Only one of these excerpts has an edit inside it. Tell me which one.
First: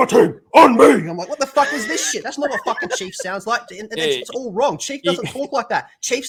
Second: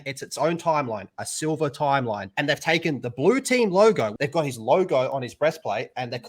second; 1 cut; at 4.2 s

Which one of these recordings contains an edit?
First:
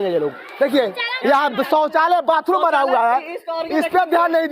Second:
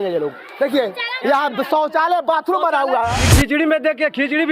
second; 1 cut; at 3.2 s

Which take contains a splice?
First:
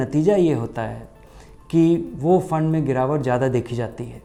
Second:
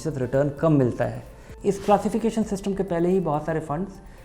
second; 1 cut; at 1.5 s

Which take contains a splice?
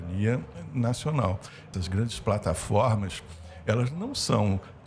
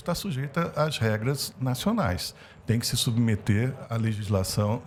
first; 1 cut; at 1.6 s

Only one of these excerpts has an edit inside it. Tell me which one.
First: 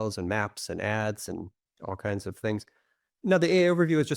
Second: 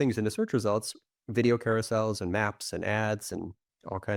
first; 1 cut; at 3.1 s

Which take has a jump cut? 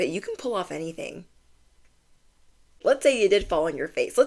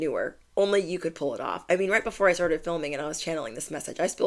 first; 1 cut; at 2.8 s

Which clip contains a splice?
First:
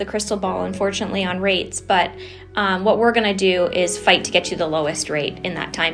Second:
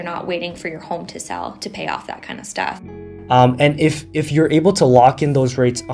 second; 1 cut; at 3.2 s

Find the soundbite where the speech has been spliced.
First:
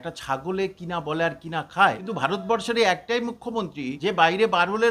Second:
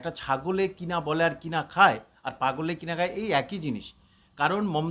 first; 2 cuts; at 2.1 s, 3.9 s

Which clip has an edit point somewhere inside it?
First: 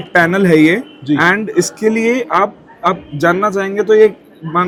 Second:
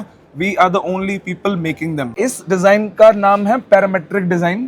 second; 1 cut; at 2.3 s

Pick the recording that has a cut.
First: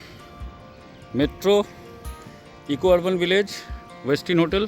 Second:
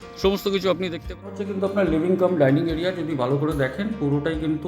second; 1 cut; at 1.4 s

